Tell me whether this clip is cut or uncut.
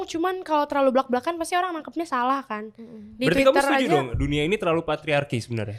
uncut